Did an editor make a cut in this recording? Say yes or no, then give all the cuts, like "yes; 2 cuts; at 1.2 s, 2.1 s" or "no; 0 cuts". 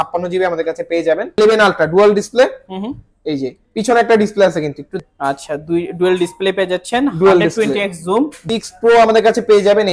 yes; 3 cuts; at 1.4 s, 5.0 s, 8.4 s